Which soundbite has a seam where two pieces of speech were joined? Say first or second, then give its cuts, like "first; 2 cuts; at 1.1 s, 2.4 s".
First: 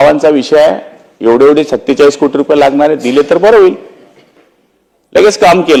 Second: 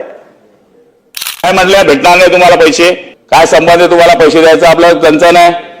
second; 2 cuts; at 1.5 s, 3.1 s